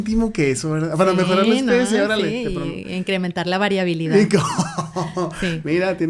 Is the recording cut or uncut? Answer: uncut